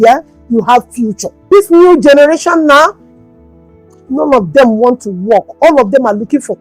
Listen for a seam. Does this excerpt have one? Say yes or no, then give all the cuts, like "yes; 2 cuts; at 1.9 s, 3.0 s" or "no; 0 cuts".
yes; 1 cut; at 1.5 s